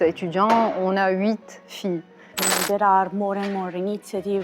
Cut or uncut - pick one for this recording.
cut